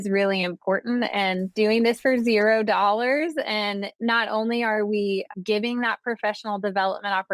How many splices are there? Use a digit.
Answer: 3